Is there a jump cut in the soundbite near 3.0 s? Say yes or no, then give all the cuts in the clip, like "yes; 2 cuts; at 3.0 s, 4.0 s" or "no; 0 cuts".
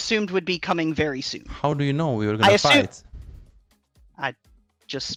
no; 0 cuts